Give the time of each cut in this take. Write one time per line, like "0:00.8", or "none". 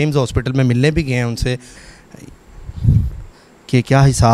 0:01.8